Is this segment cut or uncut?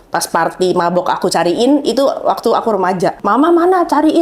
cut